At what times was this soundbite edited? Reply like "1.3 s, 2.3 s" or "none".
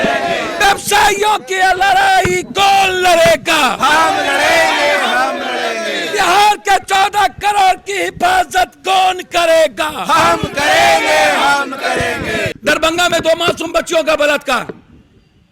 12.5 s